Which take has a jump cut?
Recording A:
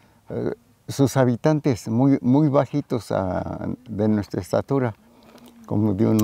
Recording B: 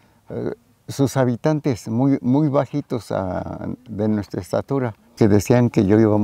B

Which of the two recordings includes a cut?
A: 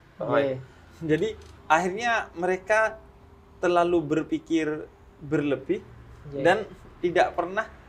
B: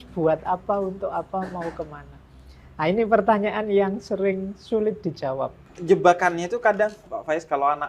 B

